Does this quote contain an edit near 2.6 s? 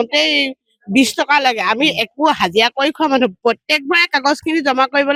no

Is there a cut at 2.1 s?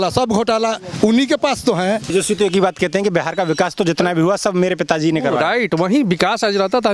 yes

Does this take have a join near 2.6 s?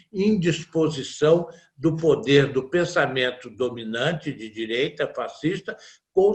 no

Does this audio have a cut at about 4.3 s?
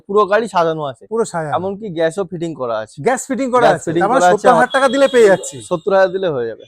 yes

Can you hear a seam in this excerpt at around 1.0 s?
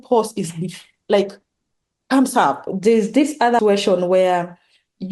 no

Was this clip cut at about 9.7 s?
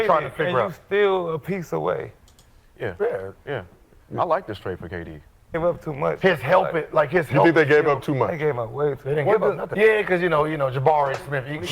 yes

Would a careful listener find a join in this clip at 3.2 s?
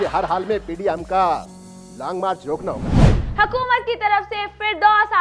yes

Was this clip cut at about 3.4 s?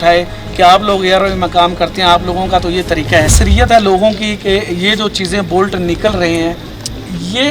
yes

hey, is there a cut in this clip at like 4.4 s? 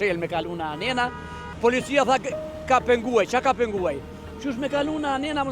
no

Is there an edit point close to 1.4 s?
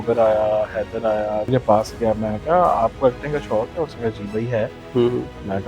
yes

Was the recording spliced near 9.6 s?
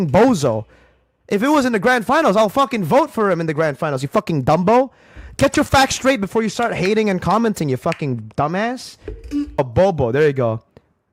yes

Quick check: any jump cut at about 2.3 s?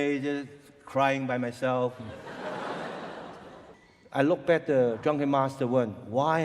no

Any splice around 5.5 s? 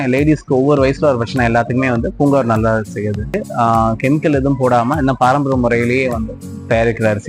no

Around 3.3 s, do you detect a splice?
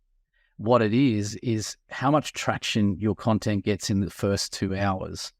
no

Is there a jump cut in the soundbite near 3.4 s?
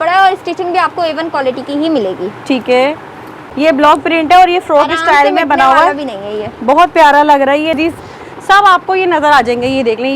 yes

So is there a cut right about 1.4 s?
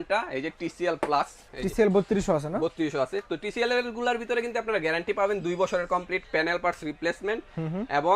yes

